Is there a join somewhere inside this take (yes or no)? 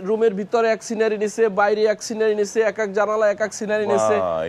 no